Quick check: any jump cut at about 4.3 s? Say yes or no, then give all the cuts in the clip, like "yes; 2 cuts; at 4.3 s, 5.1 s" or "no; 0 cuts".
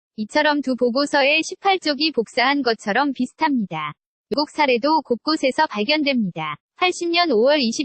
yes; 1 cut; at 4.3 s